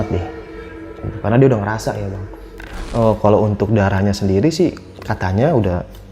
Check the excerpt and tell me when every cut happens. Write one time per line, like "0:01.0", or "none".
0:02.5